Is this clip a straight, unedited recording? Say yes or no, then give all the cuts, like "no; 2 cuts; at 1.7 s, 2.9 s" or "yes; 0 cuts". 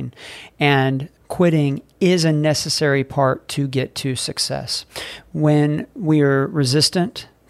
no; 1 cut; at 1.1 s